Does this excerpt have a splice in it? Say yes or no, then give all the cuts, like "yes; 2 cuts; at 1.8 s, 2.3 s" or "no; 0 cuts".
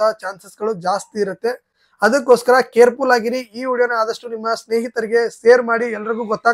no; 0 cuts